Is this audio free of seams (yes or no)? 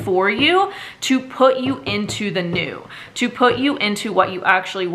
yes